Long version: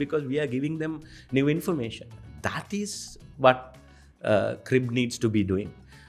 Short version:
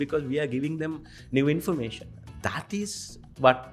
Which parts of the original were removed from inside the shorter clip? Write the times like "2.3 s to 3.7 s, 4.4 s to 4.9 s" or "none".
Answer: none